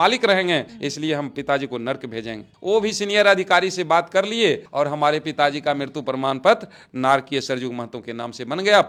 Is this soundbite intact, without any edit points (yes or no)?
yes